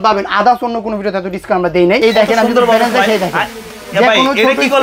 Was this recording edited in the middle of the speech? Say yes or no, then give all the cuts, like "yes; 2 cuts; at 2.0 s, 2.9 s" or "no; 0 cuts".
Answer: yes; 1 cut; at 2.0 s